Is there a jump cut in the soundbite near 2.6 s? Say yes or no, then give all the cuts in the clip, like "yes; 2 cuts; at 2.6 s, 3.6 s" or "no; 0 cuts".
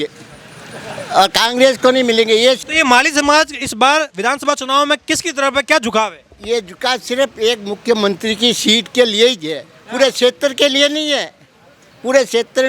yes; 1 cut; at 2.6 s